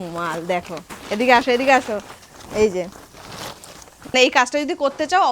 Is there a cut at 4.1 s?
yes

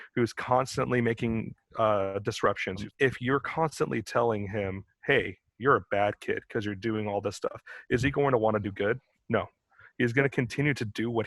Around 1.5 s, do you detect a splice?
no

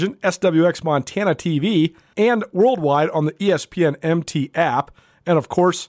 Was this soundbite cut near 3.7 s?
no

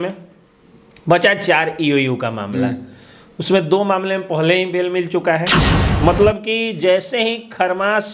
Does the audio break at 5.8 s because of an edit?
yes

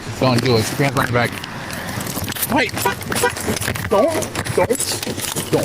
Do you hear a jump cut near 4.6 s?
no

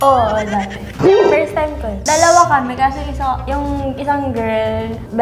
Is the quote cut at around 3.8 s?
no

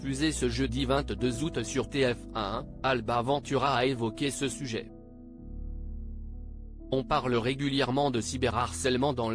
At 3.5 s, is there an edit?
no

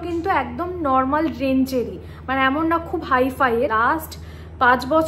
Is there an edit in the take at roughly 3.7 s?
yes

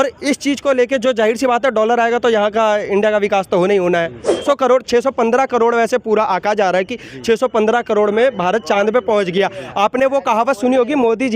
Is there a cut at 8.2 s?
no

